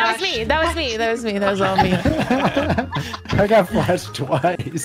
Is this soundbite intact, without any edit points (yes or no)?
yes